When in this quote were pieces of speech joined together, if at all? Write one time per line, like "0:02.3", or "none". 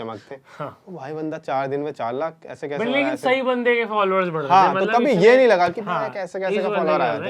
none